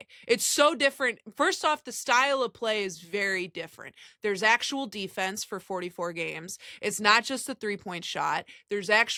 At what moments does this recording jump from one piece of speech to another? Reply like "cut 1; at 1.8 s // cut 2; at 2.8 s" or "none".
none